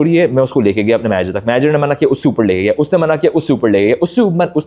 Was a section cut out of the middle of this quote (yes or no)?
no